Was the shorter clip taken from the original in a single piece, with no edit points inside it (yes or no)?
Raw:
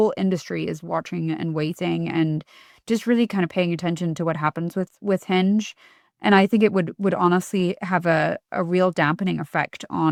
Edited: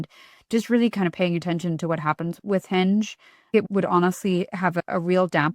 no